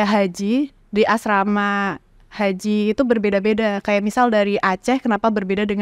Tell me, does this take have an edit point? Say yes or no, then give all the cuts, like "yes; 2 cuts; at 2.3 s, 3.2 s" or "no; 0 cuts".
no; 0 cuts